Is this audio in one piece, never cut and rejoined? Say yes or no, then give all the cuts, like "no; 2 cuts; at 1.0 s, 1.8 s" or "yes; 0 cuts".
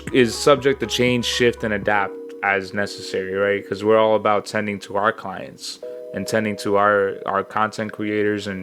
yes; 0 cuts